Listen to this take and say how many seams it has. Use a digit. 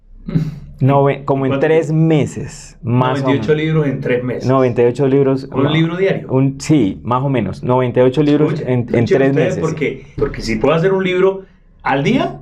1